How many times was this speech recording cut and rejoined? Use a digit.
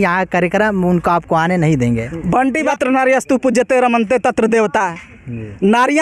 1